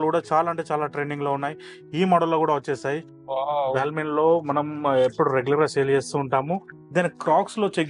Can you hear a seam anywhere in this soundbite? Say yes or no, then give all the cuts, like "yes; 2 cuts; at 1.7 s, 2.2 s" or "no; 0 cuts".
yes; 2 cuts; at 3.1 s, 6.8 s